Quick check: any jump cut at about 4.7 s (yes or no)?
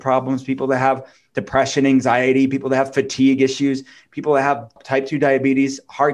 yes